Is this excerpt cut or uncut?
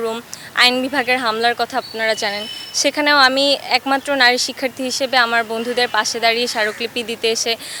uncut